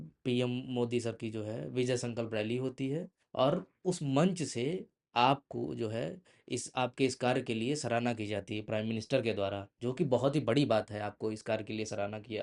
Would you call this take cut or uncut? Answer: uncut